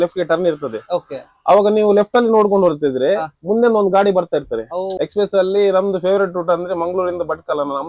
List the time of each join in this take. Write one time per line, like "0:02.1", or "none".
0:04.9